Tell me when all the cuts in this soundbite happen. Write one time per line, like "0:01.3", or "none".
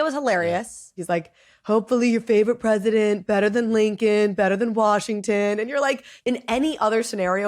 0:01.0
0:06.1